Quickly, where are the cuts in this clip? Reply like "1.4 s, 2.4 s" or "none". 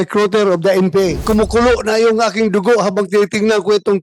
1.2 s